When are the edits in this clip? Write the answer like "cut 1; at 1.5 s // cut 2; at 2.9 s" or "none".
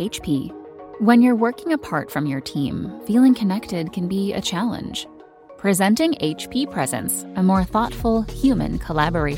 none